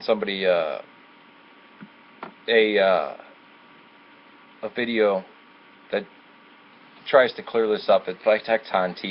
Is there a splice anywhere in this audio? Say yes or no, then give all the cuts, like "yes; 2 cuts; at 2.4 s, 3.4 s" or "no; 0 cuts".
no; 0 cuts